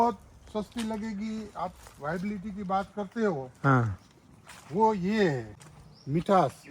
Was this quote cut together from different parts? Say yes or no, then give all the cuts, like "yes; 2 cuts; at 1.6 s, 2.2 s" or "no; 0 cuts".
yes; 1 cut; at 5.5 s